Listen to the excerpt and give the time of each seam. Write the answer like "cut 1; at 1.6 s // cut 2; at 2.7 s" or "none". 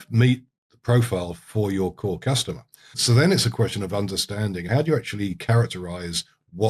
cut 1; at 3.0 s // cut 2; at 4.6 s